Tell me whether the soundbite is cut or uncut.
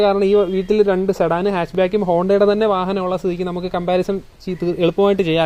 uncut